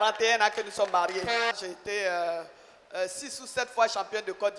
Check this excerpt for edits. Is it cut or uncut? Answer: cut